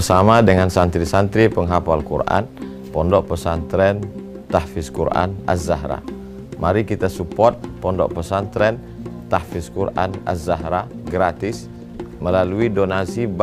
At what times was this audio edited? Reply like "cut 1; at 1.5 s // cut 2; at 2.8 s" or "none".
none